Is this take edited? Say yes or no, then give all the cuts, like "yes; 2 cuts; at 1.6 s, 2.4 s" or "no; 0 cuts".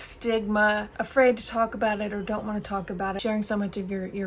yes; 2 cuts; at 1.0 s, 3.2 s